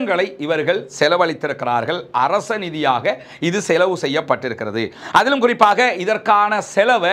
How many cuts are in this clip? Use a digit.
0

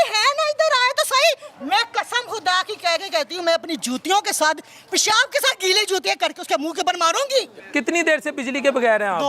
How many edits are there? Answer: 1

